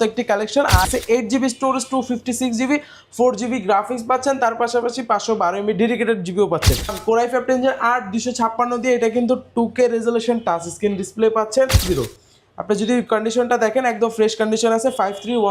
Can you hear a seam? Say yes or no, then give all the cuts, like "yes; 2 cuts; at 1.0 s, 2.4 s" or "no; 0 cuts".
yes; 3 cuts; at 0.9 s, 7.0 s, 11.8 s